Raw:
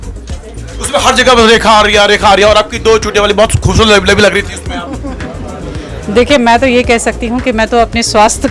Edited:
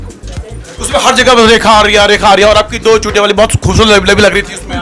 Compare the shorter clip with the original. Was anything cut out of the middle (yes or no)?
no